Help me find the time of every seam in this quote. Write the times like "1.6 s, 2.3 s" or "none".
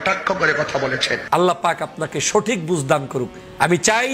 1.2 s